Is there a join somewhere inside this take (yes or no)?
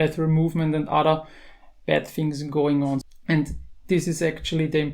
yes